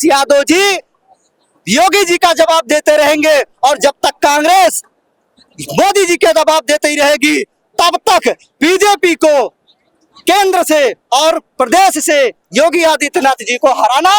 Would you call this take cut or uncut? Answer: uncut